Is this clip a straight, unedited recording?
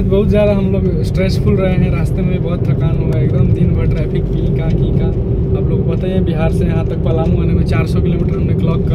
yes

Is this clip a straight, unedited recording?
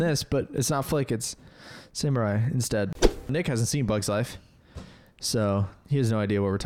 no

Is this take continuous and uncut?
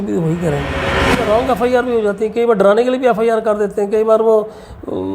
no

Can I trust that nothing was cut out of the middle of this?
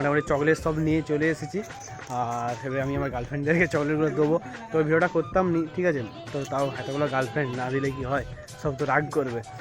no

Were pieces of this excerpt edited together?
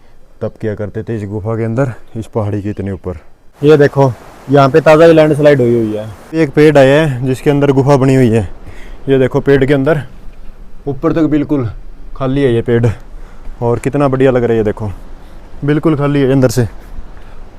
yes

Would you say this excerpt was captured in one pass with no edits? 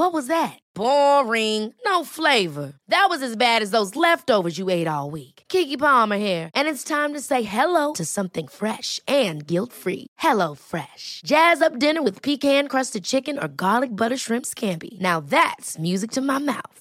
yes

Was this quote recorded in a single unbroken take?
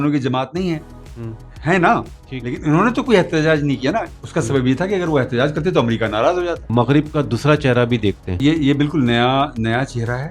no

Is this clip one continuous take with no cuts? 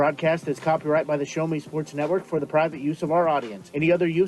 yes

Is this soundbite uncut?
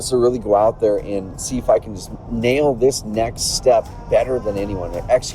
no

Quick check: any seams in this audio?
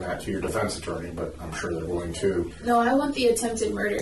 yes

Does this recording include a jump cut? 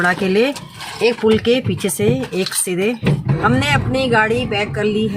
yes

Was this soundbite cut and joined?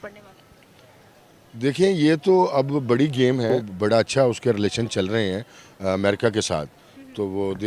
yes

